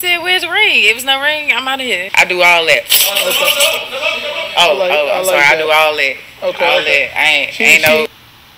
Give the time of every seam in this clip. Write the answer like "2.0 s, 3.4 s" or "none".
2.0 s